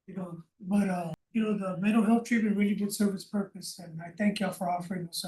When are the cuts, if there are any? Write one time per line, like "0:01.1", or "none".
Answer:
0:01.2